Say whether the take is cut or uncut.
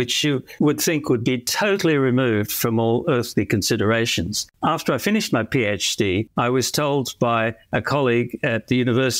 cut